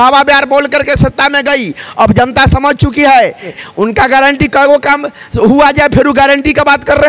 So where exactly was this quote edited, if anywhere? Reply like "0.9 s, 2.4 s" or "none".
3.5 s